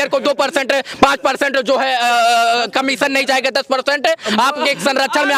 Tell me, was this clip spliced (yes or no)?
no